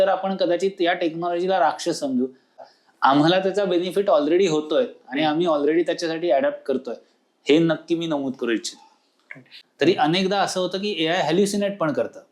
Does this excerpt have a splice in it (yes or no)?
yes